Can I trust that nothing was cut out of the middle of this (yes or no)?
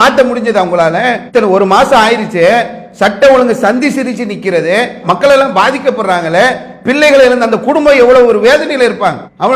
no